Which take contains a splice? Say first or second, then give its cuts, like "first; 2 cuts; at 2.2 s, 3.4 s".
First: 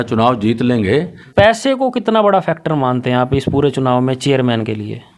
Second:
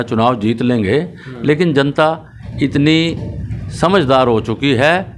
first; 1 cut; at 1.2 s